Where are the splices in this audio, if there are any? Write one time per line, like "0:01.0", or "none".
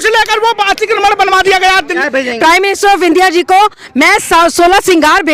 0:02.0

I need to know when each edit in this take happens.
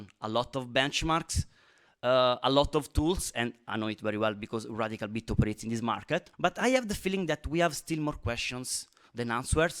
0:06.3

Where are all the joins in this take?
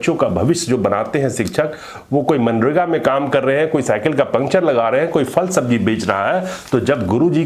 none

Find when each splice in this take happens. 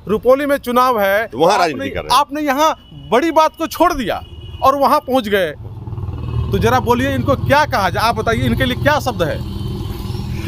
none

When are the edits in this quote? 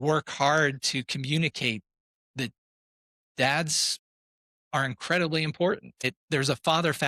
0:06.0

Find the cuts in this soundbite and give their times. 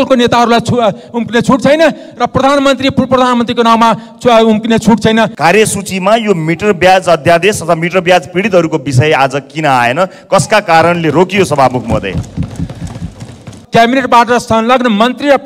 0:05.3
0:13.5

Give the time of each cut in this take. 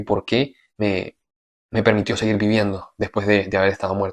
none

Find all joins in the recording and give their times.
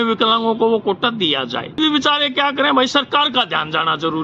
0:01.8

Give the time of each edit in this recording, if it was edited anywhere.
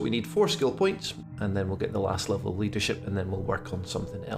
none

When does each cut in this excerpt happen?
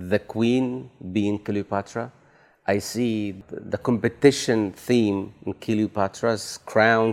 0:03.3

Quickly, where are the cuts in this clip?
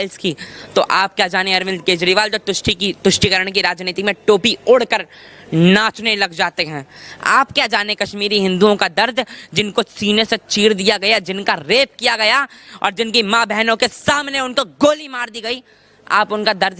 none

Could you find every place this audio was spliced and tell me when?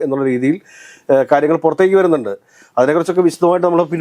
none

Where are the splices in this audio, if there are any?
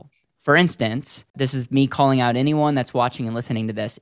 0:01.3

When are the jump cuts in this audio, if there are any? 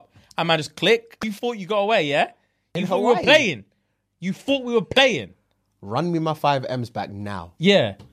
0:01.3
0:02.7

